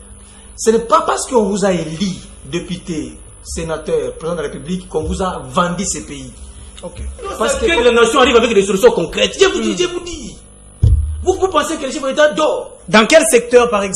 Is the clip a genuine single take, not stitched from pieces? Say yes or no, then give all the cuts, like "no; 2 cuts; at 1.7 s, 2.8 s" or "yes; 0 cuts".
no; 1 cut; at 7.7 s